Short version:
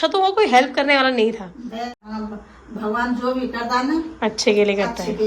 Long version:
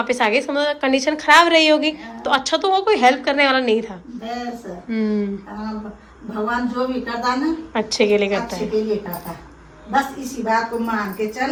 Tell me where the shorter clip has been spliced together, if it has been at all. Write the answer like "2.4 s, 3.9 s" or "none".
2.0 s